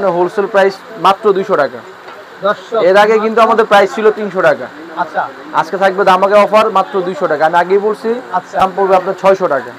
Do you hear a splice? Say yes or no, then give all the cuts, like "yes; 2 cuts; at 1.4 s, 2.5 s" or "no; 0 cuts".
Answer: yes; 1 cut; at 8.6 s